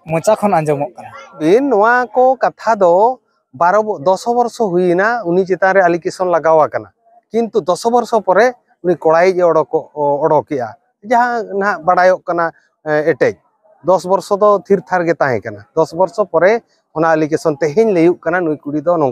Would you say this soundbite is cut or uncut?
cut